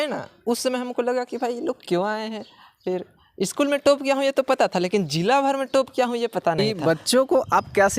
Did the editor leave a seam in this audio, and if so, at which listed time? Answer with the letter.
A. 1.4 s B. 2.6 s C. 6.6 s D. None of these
C